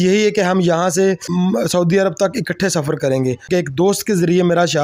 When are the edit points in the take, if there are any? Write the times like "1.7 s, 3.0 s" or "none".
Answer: 1.2 s, 3.5 s